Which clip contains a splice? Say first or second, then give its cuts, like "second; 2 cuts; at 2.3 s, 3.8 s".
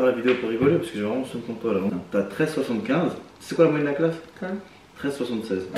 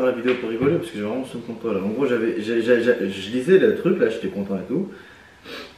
first; 1 cut; at 1.9 s